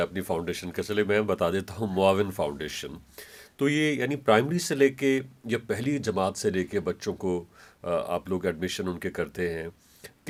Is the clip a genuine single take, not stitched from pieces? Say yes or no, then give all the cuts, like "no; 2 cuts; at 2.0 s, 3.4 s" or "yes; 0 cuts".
yes; 0 cuts